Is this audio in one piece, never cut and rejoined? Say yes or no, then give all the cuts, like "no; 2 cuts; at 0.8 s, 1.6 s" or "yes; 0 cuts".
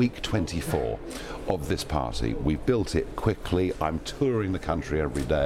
yes; 0 cuts